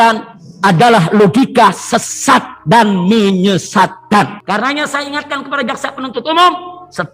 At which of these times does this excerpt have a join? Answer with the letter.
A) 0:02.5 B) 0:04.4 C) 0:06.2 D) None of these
B